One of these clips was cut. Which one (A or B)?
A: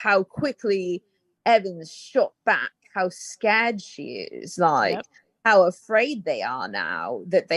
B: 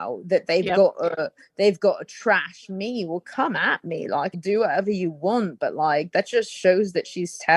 B